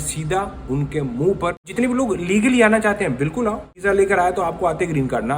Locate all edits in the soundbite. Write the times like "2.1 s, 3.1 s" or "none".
1.7 s, 3.8 s